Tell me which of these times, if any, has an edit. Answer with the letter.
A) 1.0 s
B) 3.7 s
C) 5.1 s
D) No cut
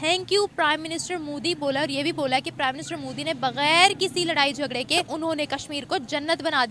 C